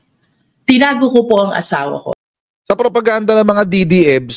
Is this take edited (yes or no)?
yes